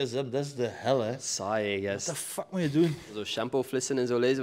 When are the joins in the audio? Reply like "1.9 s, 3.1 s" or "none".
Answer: 3.2 s